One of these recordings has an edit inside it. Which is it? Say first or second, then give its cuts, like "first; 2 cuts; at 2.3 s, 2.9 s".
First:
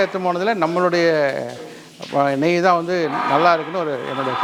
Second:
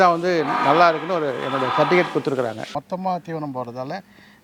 second; 1 cut; at 2.7 s